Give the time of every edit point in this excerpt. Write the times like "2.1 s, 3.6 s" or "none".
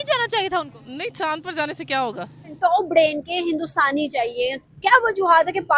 2.6 s